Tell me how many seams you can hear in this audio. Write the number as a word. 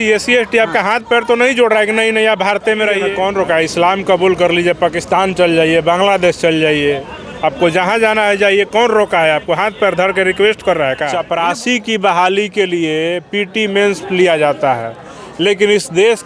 two